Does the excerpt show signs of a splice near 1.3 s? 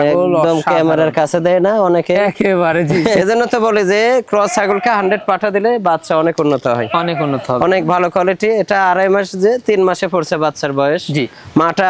no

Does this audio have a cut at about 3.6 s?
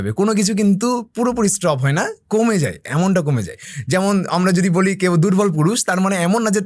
no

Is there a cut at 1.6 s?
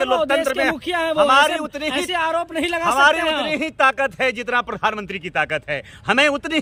no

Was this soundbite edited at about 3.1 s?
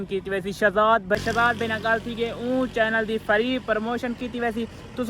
no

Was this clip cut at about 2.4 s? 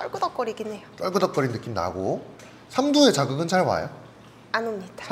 no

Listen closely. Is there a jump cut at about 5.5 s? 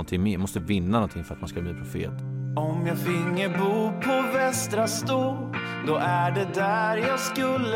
no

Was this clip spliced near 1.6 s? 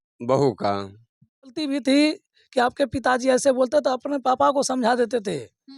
yes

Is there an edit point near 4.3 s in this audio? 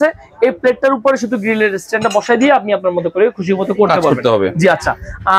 no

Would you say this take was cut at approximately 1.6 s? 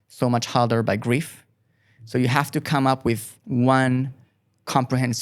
no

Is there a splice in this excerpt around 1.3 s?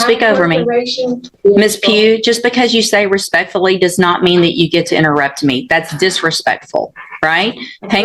yes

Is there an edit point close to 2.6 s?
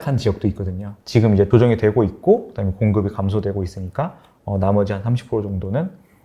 no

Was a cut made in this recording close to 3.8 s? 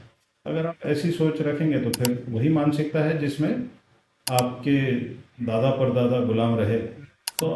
no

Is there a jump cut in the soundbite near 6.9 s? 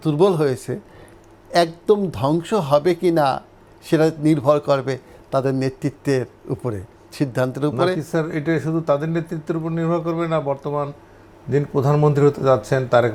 no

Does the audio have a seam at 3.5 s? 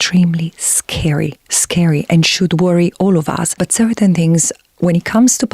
yes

